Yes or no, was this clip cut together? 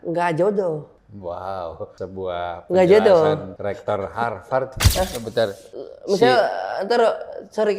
yes